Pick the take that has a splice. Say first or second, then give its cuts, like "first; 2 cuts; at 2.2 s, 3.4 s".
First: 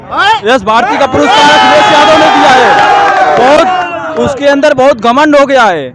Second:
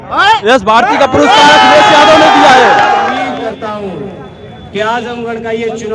second; 1 cut; at 3.1 s